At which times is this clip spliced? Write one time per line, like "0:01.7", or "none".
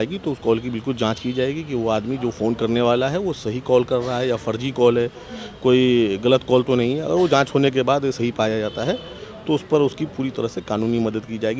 none